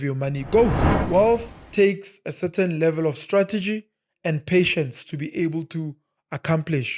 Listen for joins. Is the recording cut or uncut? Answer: cut